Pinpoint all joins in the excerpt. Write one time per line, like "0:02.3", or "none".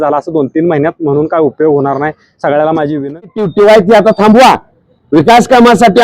0:03.3